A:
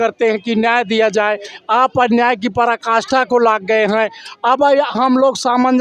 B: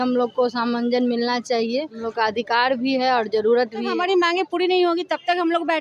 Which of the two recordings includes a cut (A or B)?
B